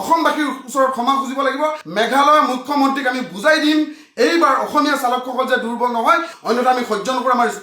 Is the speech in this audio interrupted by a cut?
yes; 2 cuts; at 1.8 s, 6.3 s

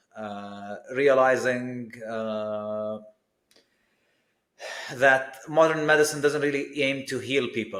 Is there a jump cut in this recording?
no; 0 cuts

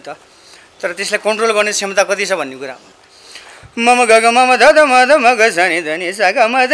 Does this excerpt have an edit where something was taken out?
yes; 1 cut; at 2.8 s

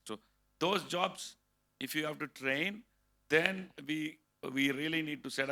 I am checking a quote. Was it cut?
no; 0 cuts

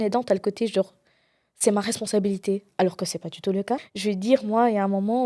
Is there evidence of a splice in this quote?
yes; 1 cut; at 3.8 s

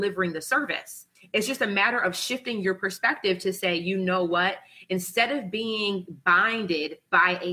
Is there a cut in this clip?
no; 0 cuts

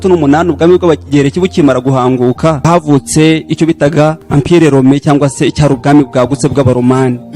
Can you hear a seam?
yes; 1 cut; at 2.6 s

